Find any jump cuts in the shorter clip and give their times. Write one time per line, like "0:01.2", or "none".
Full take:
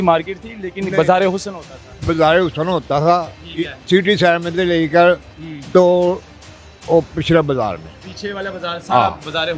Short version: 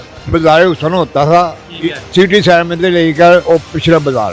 0:03.4